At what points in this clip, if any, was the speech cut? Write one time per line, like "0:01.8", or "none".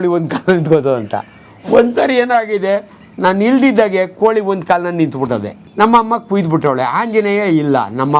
0:05.6